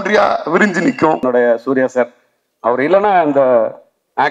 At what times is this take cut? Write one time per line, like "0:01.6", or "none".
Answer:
0:01.2

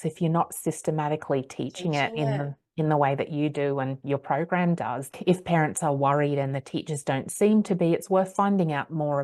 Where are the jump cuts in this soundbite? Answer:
0:05.1

